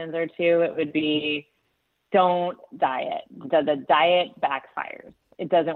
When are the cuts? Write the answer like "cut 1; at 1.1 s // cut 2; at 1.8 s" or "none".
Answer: none